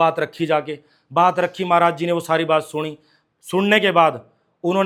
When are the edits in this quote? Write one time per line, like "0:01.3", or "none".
none